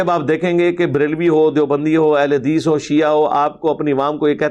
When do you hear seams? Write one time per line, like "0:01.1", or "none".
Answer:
none